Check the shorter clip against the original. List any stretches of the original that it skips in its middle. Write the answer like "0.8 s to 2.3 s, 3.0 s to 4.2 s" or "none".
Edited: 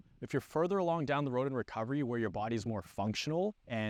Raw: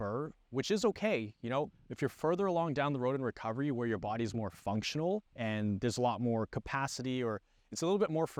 none